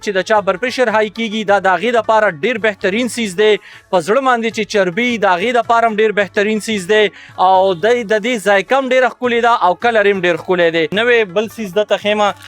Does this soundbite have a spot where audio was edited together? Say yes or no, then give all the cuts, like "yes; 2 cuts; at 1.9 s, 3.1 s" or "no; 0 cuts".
yes; 1 cut; at 10.9 s